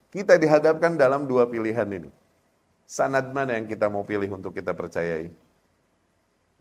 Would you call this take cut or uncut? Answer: uncut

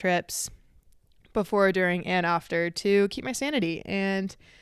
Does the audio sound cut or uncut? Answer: uncut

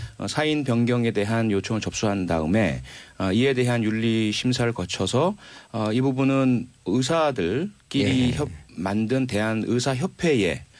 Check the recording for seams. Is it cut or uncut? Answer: cut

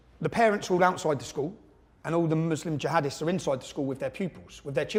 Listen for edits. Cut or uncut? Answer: uncut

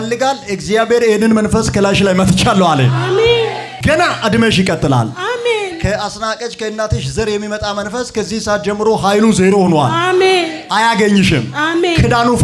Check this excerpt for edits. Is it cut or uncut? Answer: uncut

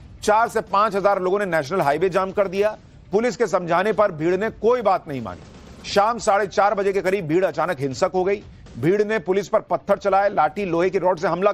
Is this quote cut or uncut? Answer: cut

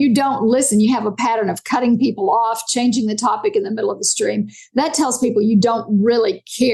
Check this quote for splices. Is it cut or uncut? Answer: uncut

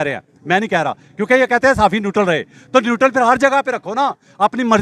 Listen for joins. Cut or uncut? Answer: uncut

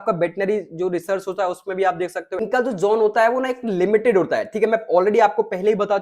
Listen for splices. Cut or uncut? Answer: cut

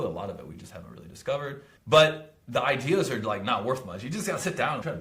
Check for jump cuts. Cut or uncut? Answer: uncut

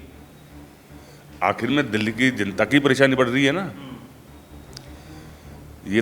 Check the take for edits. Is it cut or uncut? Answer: uncut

